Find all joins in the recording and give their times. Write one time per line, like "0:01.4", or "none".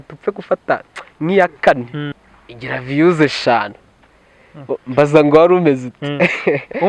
0:02.1